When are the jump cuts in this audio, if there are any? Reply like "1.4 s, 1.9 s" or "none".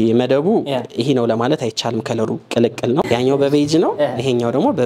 3.0 s